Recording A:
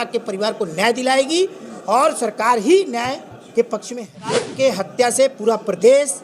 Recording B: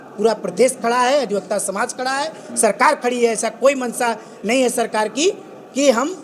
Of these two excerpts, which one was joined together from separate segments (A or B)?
A